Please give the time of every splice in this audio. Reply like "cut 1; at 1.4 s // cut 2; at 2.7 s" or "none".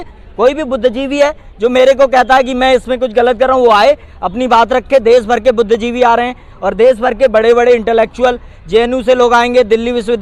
none